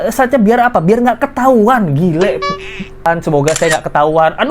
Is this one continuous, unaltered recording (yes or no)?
no